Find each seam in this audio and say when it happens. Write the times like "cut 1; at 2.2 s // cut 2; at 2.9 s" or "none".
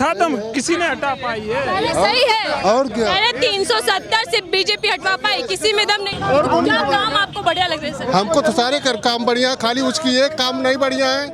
cut 1; at 6.2 s